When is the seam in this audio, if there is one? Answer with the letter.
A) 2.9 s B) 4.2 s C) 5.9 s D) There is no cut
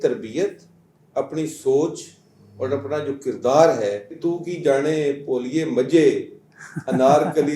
B